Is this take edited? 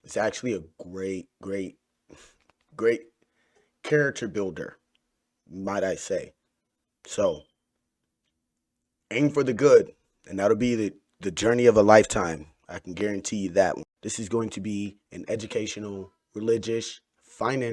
yes; 1 cut; at 13.9 s

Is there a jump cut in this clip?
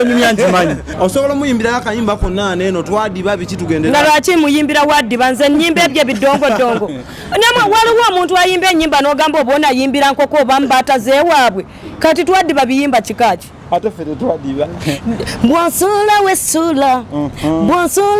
yes; 1 cut; at 0.9 s

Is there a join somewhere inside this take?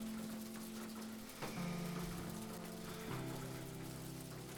no; 0 cuts

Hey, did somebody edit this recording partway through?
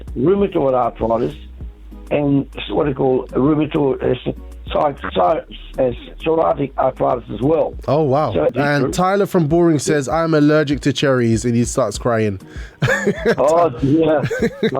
yes; 1 cut; at 8.5 s

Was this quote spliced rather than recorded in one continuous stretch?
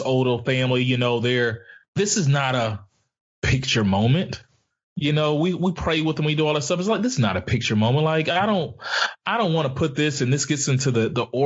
no; 0 cuts

